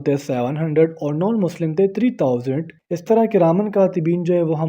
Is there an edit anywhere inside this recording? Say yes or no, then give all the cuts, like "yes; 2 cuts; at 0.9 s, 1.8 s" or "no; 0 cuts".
yes; 1 cut; at 2.7 s